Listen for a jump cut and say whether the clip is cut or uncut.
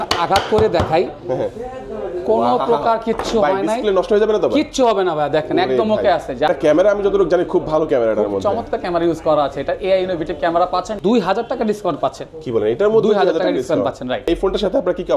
cut